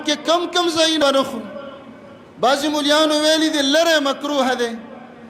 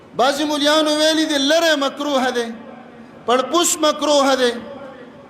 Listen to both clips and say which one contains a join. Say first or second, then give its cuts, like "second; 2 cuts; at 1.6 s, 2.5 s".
first; 1 cut; at 1.0 s